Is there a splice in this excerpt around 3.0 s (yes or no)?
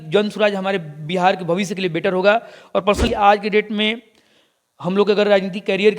yes